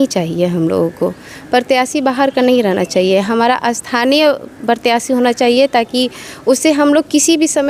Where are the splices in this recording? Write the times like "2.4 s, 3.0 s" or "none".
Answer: none